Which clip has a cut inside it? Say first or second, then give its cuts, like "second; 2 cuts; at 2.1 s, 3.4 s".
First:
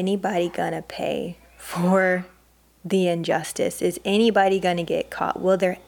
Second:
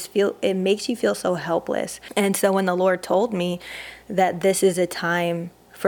second; 1 cut; at 2.0 s